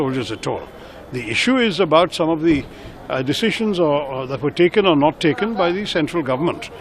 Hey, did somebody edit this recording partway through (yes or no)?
no